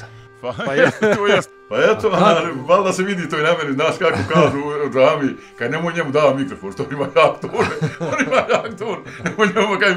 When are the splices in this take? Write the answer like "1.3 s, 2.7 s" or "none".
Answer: 1.5 s

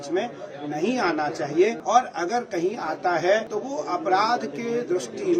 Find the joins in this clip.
1.8 s, 3.5 s

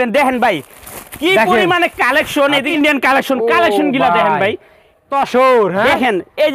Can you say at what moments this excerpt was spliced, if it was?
2.7 s, 5.1 s

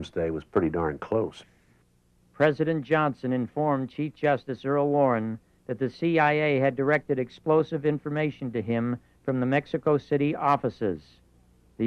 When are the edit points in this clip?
9.7 s

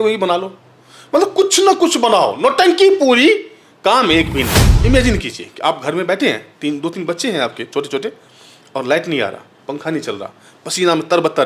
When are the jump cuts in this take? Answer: 4.6 s

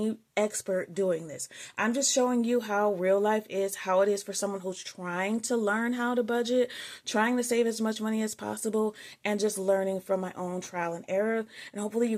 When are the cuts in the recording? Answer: none

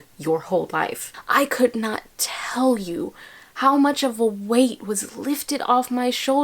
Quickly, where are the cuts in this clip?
1.1 s

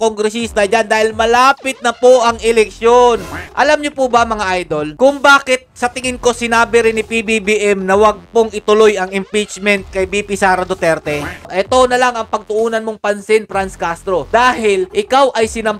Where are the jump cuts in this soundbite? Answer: 3.4 s, 11.5 s

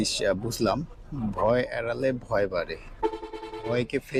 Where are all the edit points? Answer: none

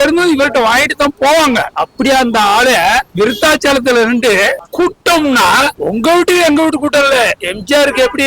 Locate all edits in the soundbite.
4.6 s

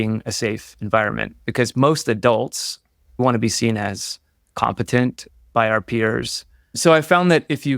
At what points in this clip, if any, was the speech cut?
3.2 s, 6.6 s

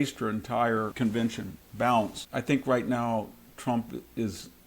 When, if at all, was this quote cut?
0.9 s, 2.2 s

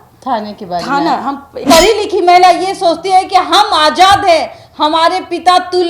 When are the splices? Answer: 1.6 s

